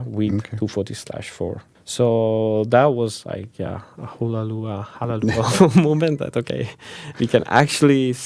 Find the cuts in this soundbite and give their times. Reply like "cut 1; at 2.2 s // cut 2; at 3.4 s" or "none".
cut 1; at 1.7 s